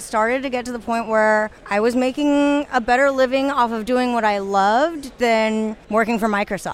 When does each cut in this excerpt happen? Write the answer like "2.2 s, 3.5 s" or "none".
1.6 s, 5.8 s